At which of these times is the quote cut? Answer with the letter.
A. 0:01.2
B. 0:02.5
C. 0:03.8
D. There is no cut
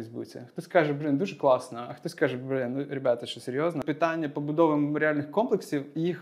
C